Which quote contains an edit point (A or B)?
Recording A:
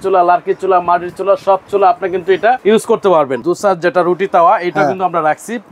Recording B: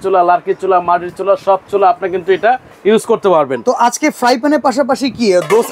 A